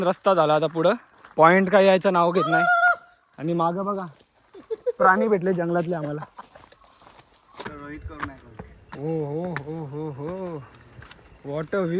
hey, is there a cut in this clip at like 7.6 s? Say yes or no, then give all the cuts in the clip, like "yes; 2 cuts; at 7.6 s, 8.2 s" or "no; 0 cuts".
yes; 1 cut; at 7.6 s